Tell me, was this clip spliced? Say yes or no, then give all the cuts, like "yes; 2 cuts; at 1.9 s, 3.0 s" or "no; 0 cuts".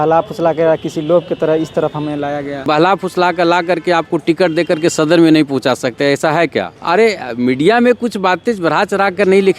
yes; 2 cuts; at 2.7 s, 6.8 s